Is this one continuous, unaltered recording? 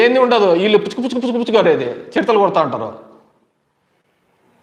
yes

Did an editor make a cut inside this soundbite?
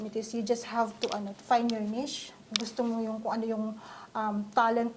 no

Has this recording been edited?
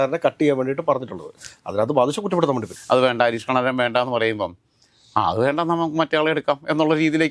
yes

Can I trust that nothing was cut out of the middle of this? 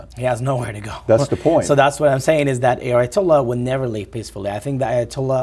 yes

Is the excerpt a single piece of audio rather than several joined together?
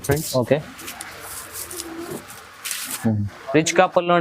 no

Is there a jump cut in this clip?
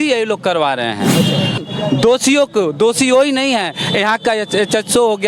yes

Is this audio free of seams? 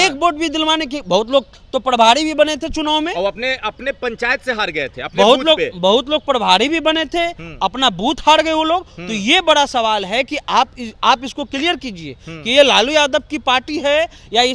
yes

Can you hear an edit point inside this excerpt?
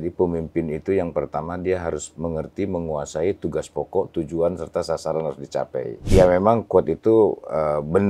yes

